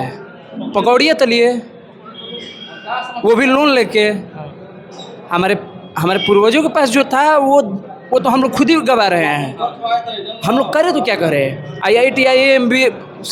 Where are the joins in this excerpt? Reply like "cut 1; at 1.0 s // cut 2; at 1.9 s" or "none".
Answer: none